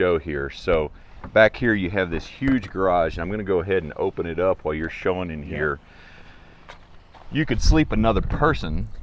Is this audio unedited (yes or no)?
yes